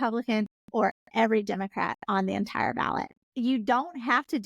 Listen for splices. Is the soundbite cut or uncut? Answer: cut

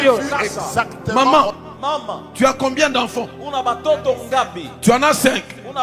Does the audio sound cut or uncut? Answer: cut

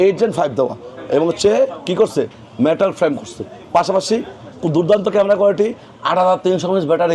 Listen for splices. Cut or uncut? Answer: cut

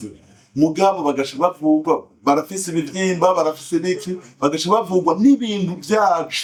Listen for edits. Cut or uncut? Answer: uncut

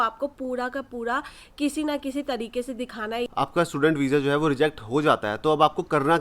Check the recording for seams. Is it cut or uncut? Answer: cut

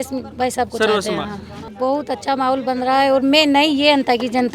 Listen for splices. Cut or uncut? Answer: cut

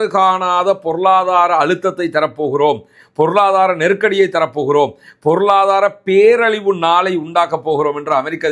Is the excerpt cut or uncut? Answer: uncut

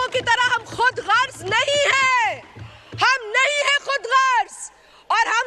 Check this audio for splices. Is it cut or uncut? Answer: uncut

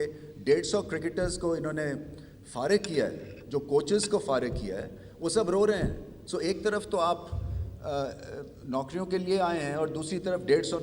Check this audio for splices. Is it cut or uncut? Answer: uncut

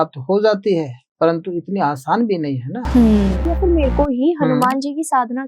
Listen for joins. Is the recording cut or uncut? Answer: cut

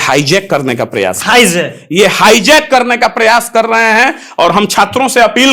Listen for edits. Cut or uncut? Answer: uncut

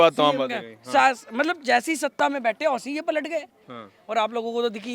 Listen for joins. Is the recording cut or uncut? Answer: cut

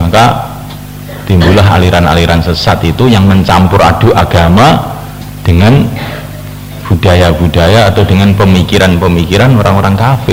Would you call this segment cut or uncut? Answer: uncut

